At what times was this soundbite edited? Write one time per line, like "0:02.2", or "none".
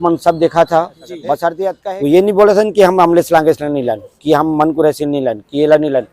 0:01.6